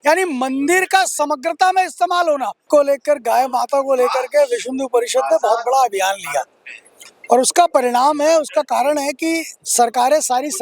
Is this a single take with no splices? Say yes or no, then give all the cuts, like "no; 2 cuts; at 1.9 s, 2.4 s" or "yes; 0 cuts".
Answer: no; 1 cut; at 2.7 s